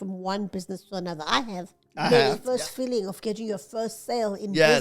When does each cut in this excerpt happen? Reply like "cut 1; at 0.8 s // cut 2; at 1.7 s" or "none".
cut 1; at 2.4 s